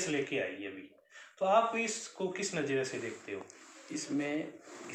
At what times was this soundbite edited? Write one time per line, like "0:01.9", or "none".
none